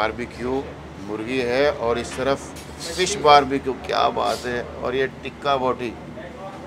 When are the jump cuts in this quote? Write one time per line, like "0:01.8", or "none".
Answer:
none